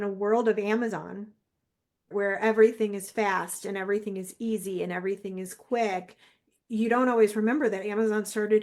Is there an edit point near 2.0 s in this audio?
yes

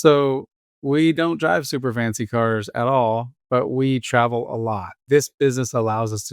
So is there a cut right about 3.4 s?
no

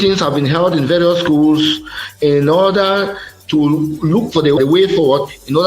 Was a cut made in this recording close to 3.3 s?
no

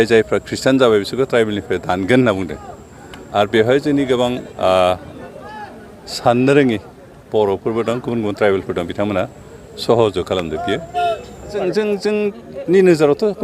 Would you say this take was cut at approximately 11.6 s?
yes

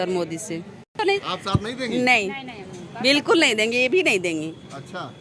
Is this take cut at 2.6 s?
no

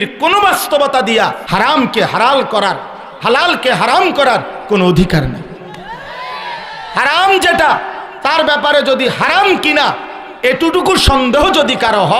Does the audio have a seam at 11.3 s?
no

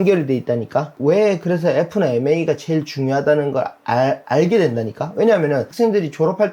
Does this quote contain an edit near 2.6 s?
no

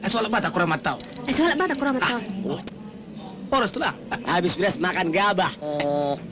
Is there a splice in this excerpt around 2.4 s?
no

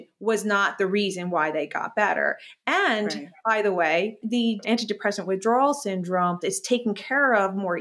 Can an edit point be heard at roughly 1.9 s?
no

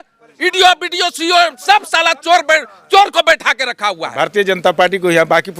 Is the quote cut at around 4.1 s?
yes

